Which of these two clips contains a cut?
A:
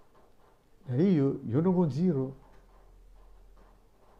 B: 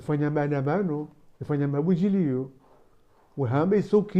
B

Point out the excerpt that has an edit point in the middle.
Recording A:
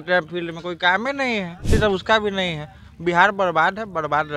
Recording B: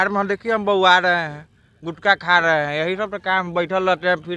A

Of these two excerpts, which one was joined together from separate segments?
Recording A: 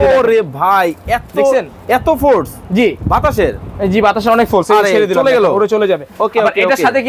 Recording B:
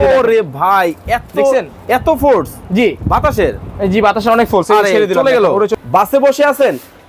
B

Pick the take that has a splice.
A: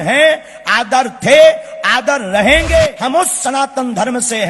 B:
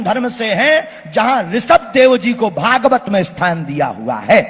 A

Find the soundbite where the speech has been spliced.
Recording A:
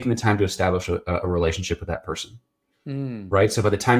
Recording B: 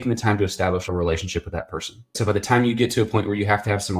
B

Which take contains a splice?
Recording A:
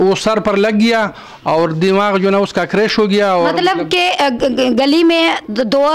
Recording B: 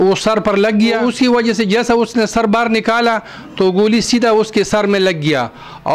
B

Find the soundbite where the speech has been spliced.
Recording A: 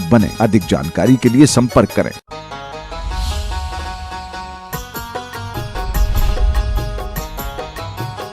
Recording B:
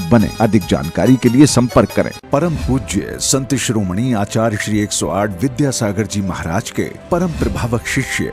A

